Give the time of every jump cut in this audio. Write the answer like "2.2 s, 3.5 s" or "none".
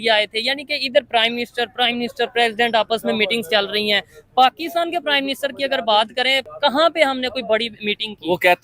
6.5 s